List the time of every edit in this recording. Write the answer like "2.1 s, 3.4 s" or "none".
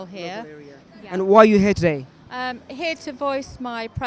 1.4 s

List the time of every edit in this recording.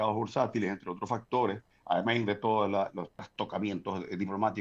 1.7 s, 3.2 s

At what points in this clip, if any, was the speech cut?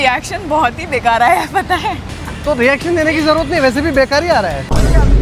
none

